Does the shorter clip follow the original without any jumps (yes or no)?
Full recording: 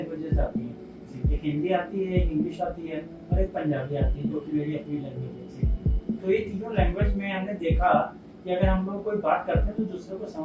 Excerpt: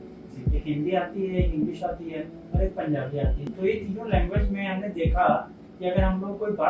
no